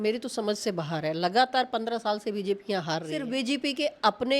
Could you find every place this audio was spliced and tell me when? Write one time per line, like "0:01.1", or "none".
0:03.2

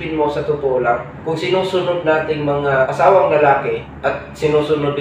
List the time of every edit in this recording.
0:01.1
0:02.9
0:03.8

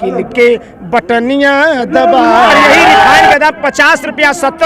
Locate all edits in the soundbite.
0:03.3

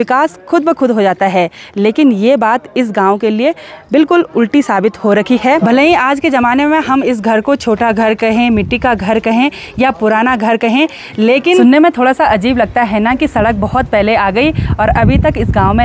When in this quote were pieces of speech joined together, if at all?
0:05.6
0:11.6

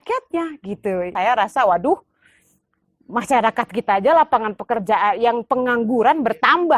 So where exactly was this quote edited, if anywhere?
0:01.1

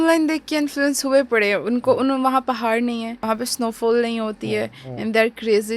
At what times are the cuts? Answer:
0:03.2

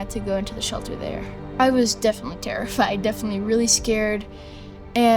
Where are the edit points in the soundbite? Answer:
0:01.4

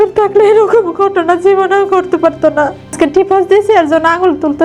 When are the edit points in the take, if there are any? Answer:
0:02.9

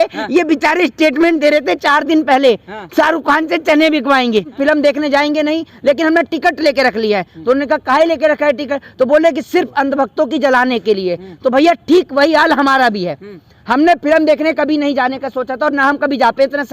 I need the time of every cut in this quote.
0:04.5

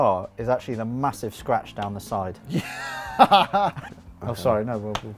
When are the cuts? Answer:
0:03.9

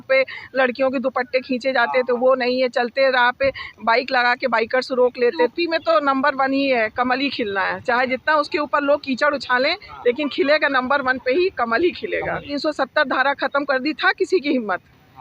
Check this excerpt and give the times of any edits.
0:05.5
0:12.6

